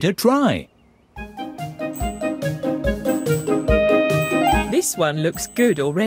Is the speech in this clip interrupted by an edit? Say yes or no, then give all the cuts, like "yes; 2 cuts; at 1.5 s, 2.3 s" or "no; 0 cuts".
yes; 1 cut; at 4.7 s